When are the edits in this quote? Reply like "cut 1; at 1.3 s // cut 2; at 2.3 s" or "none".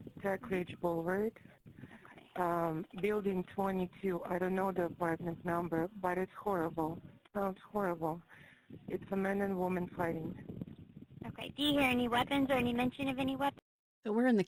none